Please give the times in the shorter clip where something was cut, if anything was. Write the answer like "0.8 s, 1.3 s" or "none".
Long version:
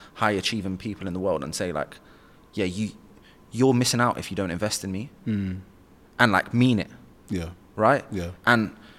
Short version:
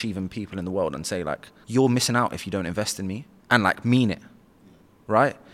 1.5 s, 3.3 s